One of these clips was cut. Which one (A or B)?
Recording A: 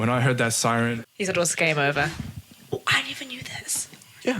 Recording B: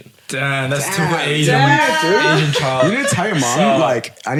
A